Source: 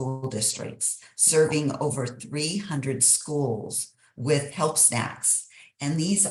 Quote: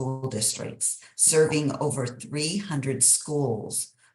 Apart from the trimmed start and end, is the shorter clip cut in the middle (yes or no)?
no